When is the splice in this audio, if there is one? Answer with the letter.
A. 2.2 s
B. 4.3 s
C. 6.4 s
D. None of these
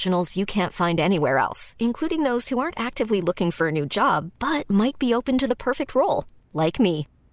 D